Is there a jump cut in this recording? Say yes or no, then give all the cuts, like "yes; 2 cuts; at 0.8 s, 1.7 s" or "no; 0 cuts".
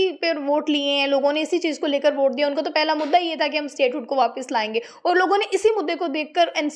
no; 0 cuts